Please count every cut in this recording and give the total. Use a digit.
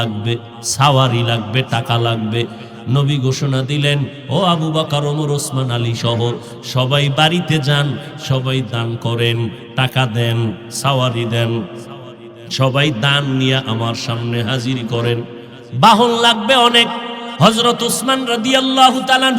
1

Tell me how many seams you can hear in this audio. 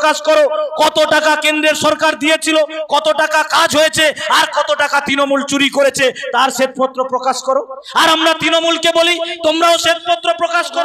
0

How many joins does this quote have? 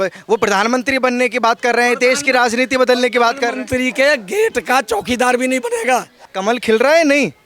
1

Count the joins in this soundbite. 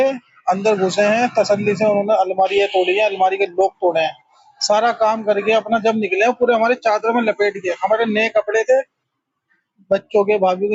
0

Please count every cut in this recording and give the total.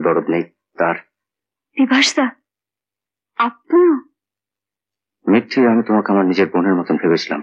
0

